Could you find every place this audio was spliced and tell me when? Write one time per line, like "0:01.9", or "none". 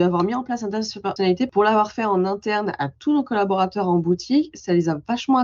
none